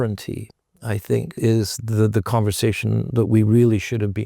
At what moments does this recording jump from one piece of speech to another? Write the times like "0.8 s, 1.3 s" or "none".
1.3 s